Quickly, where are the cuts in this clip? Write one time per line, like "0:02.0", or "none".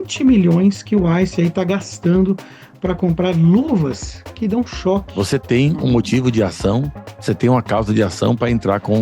0:05.1